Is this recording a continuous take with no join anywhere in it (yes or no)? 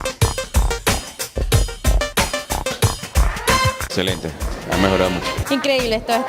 no